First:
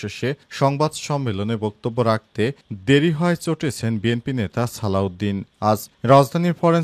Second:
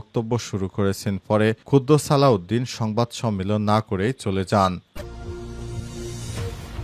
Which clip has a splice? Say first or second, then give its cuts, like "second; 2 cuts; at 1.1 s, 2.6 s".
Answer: second; 1 cut; at 4.8 s